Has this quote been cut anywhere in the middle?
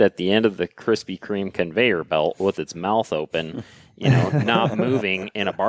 no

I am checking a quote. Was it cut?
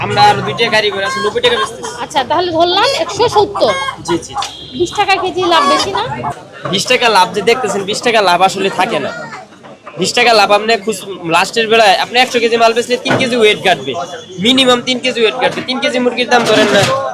yes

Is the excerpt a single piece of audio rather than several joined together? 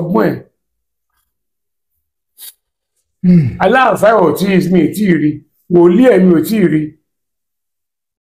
yes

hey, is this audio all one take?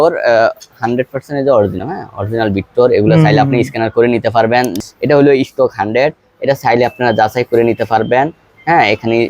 no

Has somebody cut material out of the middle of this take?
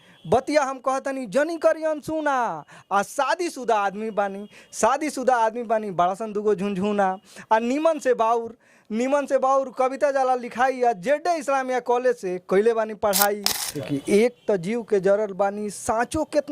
yes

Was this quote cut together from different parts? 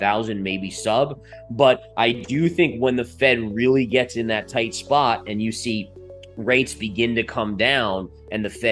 no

